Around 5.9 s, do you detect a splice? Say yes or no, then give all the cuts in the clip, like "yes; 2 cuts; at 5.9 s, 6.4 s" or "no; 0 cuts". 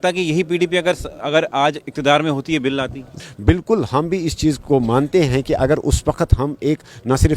no; 1 cut; at 3.0 s